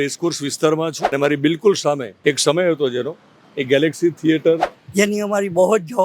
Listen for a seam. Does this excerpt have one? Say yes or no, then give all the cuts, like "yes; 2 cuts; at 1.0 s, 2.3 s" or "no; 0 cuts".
yes; 3 cuts; at 1.1 s, 2.1 s, 4.8 s